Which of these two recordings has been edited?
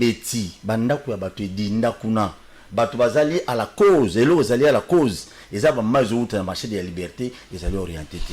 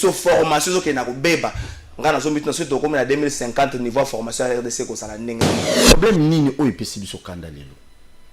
second; 1 cut; at 5.7 s

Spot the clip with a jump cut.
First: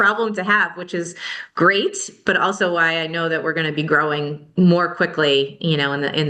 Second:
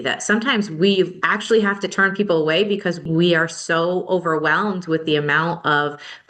second; 2 cuts; at 1.3 s, 3.0 s

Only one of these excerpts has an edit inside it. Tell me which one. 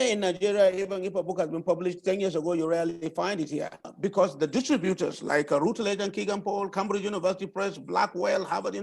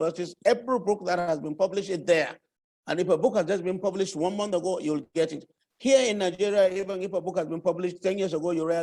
first; 1 cut; at 3.9 s

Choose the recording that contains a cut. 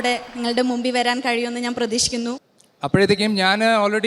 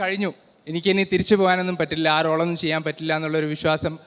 first; 1 cut; at 2.4 s

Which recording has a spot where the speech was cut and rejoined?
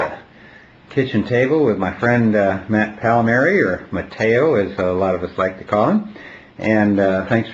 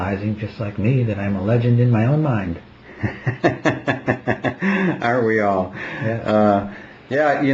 second; 1 cut; at 3.6 s

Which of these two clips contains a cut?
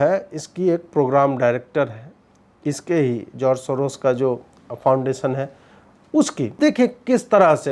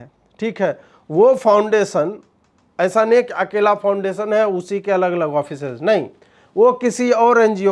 first; 1 cut; at 6.5 s

